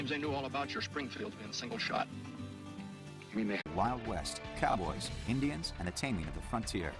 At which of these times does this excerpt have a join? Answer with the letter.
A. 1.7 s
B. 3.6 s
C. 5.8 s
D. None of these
D